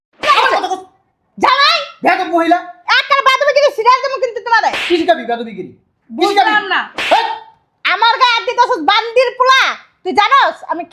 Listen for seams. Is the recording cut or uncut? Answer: uncut